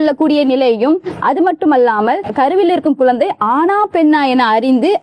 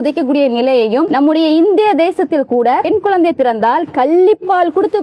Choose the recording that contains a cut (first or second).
second